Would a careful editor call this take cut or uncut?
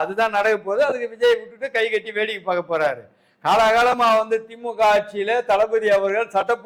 uncut